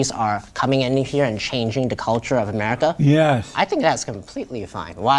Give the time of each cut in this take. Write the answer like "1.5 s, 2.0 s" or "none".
none